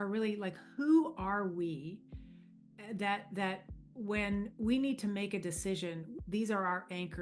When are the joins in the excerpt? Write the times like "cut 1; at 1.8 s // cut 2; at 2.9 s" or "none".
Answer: none